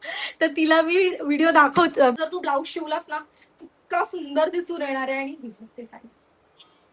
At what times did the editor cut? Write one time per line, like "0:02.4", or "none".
0:02.2